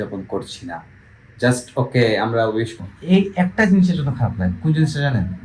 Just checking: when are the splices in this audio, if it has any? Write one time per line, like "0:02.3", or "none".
0:02.8